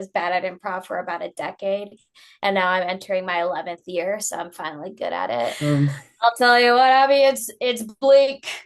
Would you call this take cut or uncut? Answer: cut